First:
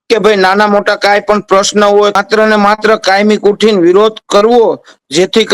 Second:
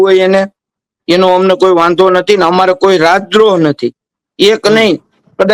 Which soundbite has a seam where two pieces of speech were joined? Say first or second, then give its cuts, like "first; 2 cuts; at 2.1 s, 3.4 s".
first; 1 cut; at 2.2 s